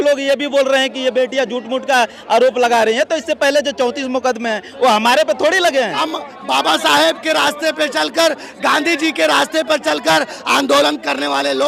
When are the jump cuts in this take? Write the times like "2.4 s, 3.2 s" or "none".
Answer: 6.0 s